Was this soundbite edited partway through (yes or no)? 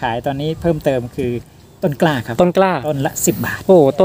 yes